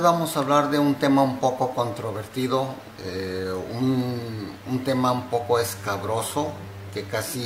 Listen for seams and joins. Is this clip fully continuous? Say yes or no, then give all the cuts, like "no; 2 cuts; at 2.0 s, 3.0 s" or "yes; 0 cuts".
yes; 0 cuts